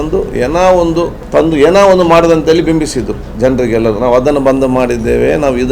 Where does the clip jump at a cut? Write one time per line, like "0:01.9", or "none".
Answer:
0:01.2